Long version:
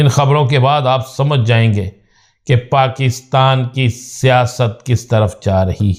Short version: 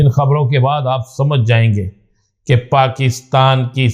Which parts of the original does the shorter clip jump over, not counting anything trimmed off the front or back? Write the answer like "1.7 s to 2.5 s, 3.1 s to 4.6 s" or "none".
none